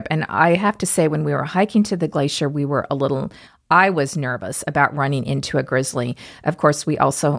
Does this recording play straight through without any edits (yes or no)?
yes